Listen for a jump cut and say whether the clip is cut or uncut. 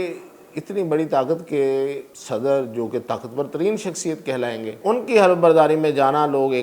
cut